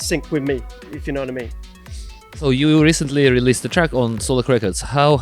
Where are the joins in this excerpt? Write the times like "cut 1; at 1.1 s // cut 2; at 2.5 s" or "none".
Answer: cut 1; at 2.4 s